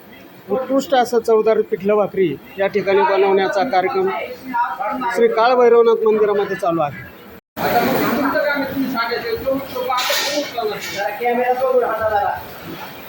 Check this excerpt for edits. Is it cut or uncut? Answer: cut